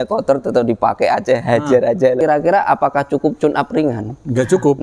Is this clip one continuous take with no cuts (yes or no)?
no